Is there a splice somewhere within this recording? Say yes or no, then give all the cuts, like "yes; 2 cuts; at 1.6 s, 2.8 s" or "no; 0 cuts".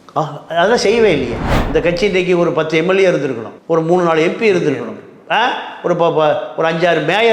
yes; 1 cut; at 1.5 s